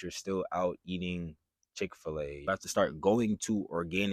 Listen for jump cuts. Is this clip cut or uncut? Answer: cut